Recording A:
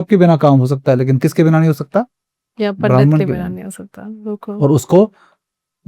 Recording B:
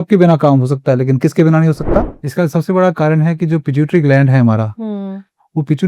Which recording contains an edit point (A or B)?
B